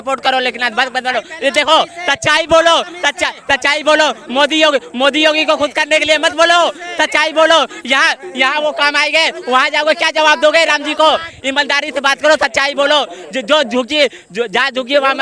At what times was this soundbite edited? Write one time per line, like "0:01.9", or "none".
none